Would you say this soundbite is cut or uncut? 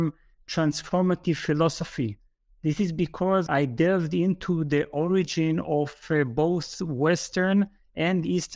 cut